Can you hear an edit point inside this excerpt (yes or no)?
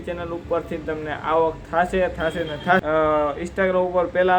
yes